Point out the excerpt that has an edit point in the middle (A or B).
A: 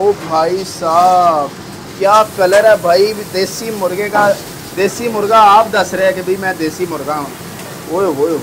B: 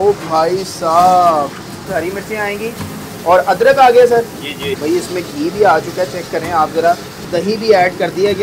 B